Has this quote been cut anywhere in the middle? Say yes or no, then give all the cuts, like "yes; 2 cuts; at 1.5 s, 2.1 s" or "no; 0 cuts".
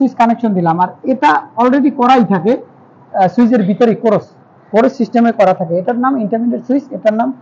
no; 0 cuts